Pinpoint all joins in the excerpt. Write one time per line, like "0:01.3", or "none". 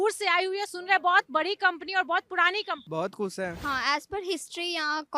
0:02.8
0:03.6